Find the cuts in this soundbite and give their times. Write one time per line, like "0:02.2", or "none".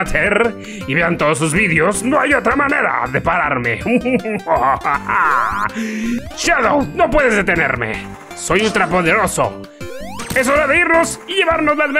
0:06.3